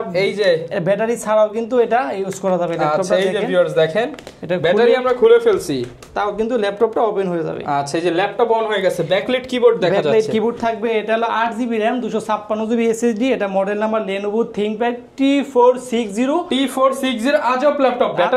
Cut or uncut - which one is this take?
uncut